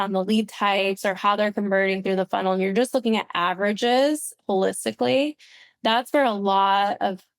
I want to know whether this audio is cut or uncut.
uncut